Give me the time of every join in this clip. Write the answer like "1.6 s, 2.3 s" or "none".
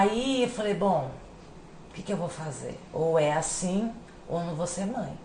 none